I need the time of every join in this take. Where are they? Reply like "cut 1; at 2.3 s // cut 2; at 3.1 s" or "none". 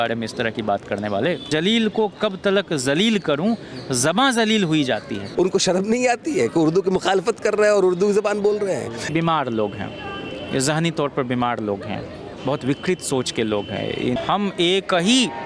cut 1; at 1.4 s // cut 2; at 5.3 s // cut 3; at 9.1 s // cut 4; at 14.2 s